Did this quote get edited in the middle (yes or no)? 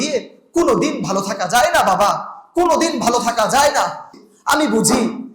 yes